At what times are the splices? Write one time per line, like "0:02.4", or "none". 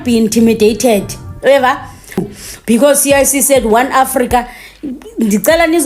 0:02.2